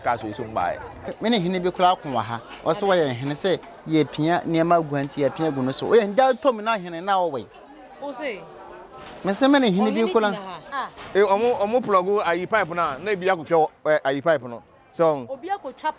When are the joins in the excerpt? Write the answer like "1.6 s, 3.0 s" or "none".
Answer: 1.1 s, 10.7 s

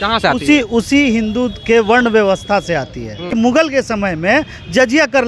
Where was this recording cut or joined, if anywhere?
3.3 s

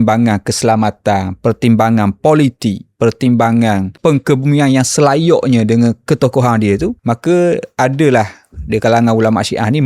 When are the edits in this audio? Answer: 3.9 s, 7.0 s

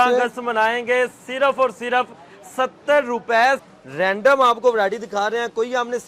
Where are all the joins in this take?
3.6 s

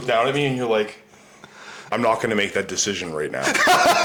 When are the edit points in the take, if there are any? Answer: none

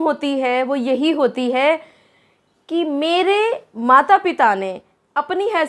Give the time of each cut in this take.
none

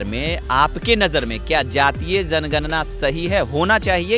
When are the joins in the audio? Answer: none

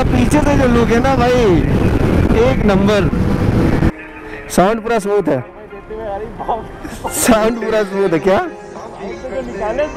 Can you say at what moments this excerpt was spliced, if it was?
3.9 s

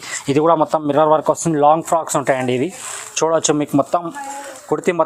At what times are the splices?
none

